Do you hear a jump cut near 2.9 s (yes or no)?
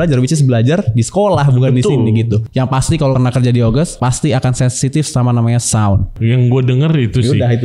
yes